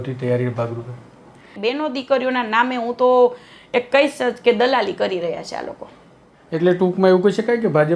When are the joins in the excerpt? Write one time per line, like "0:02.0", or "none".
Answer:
0:01.5
0:06.3

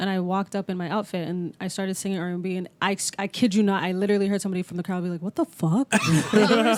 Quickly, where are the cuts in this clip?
none

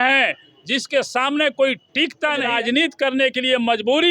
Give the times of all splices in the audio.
0:02.5

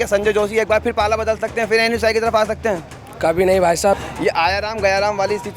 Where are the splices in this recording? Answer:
0:04.0

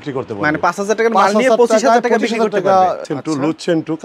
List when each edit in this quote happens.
0:03.0

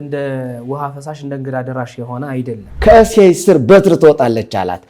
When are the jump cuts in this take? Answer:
0:02.7

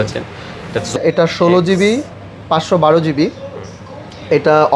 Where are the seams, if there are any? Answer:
0:01.0

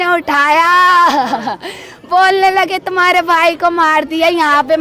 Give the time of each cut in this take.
none

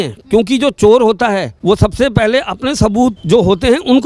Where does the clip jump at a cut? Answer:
0:01.5
0:03.2

